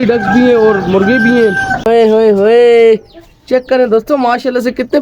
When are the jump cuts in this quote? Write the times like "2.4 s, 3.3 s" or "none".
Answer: 1.8 s